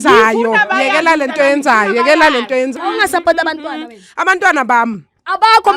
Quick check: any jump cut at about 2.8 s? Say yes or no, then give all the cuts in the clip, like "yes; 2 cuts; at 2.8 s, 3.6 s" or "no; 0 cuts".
yes; 1 cut; at 2.8 s